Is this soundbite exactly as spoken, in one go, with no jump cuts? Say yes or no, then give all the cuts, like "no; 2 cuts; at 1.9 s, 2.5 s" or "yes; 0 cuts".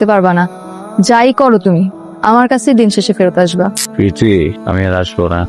no; 3 cuts; at 2.1 s, 3.8 s, 4.6 s